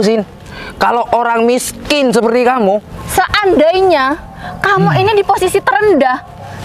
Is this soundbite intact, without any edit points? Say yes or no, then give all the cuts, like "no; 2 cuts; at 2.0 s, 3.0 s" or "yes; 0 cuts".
no; 1 cut; at 2.9 s